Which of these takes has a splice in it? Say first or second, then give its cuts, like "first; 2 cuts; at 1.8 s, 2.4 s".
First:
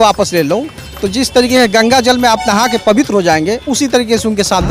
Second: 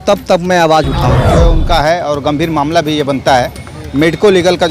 second; 1 cut; at 1.3 s